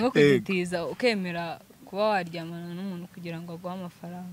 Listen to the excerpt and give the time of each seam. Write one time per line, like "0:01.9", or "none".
none